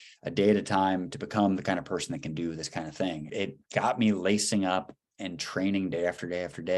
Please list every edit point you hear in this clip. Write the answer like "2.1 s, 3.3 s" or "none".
3.3 s